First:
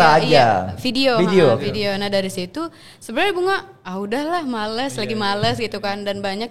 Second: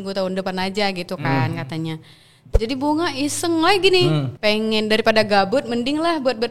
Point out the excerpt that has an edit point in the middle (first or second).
second